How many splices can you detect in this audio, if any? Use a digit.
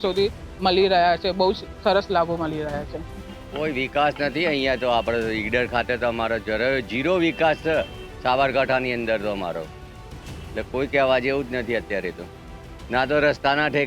1